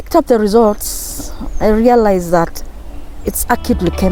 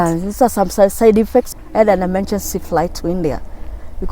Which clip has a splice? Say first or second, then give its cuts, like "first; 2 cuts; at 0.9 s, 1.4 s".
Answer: second; 1 cut; at 1.5 s